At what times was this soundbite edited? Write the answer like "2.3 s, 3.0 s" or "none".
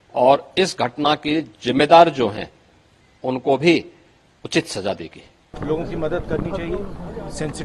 5.5 s